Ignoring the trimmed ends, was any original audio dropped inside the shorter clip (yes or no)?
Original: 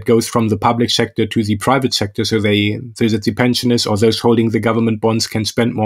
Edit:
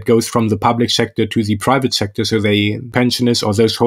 yes